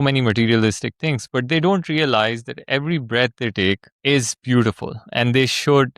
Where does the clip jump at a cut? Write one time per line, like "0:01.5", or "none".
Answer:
0:03.9

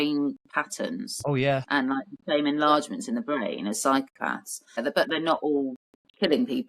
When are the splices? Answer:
0:04.6

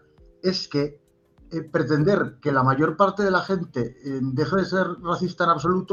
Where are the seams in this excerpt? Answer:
none

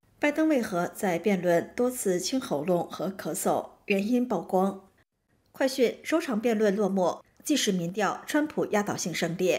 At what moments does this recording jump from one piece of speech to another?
0:05.1

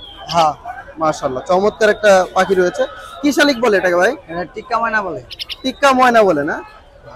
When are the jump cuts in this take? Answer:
none

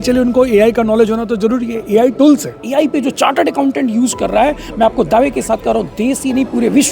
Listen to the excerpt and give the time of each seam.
0:02.9

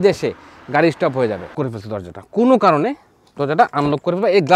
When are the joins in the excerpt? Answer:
0:01.5

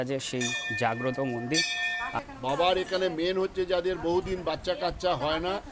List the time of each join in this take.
0:02.1

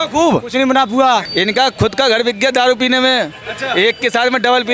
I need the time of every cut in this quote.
0:01.3

